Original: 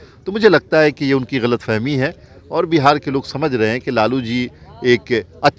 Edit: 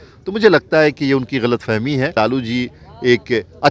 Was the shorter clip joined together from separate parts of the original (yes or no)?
yes